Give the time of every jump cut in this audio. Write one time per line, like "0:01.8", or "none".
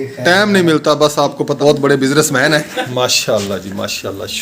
0:01.6
0:02.8